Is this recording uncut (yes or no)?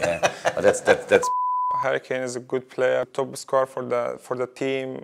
no